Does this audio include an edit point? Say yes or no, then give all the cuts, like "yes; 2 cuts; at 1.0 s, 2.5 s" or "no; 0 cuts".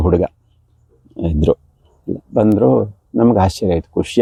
no; 0 cuts